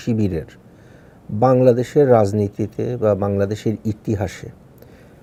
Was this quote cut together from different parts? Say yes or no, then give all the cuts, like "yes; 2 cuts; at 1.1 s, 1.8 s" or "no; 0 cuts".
no; 0 cuts